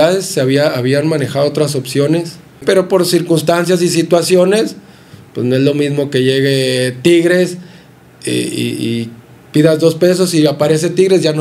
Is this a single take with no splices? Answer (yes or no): no